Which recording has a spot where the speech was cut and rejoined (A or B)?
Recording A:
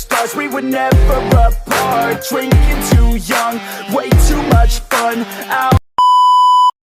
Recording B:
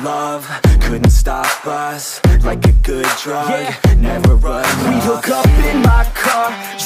A